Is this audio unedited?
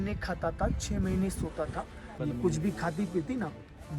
no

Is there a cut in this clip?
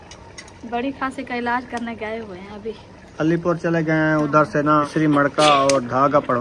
yes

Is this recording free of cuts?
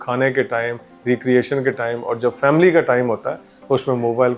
yes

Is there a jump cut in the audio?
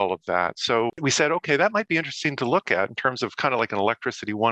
yes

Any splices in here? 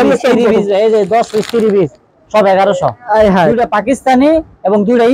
yes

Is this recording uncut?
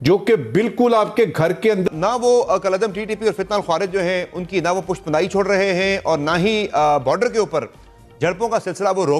no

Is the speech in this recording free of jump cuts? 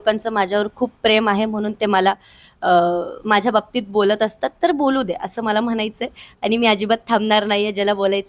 yes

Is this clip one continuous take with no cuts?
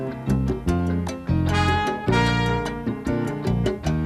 yes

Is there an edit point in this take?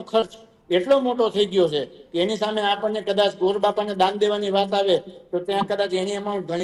no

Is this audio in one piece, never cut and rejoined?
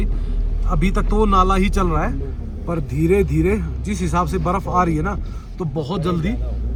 yes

